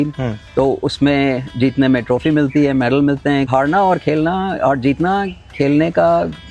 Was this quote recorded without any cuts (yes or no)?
no